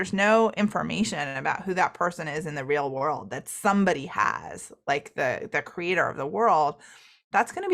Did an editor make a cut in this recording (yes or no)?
no